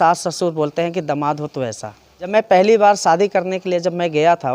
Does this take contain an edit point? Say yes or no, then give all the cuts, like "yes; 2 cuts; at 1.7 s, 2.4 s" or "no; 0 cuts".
yes; 1 cut; at 2.3 s